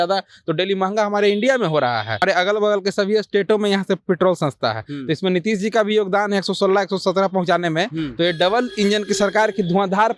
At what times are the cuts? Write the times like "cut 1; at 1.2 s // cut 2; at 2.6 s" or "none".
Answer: cut 1; at 2.2 s